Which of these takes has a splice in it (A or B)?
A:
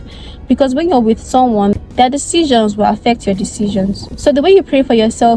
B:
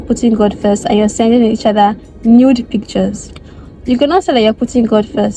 A